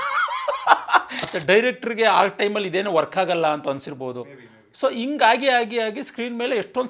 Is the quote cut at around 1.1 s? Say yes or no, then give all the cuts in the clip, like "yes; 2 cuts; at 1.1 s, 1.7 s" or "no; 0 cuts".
yes; 1 cut; at 1.1 s